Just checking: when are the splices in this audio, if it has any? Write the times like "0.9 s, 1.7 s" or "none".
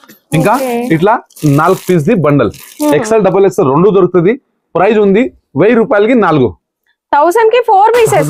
none